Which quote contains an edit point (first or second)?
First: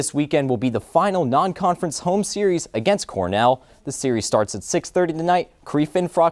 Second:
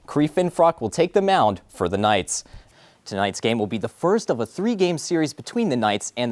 second